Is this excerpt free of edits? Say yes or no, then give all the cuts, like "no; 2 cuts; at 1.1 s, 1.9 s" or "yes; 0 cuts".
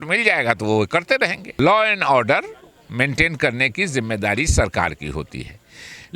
no; 1 cut; at 1.6 s